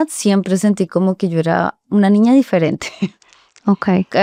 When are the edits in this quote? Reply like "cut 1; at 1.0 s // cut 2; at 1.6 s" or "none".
none